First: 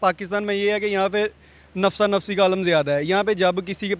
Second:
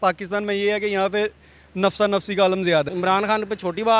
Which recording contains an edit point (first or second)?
second